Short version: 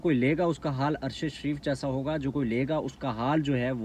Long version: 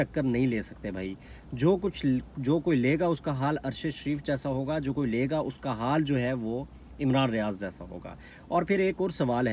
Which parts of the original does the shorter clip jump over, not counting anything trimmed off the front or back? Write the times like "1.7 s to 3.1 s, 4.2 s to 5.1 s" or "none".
none